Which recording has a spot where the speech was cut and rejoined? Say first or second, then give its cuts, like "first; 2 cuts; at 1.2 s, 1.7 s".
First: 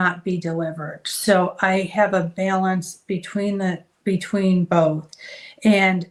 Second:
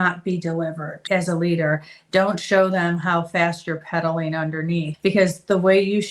second; 2 cuts; at 1.0 s, 4.9 s